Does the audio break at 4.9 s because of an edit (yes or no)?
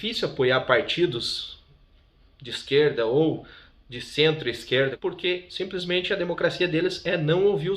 yes